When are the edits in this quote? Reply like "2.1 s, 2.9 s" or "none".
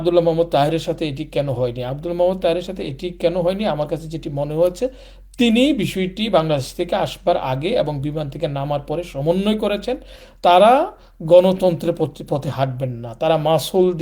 10.2 s